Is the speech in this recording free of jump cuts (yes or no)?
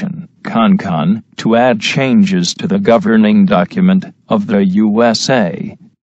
no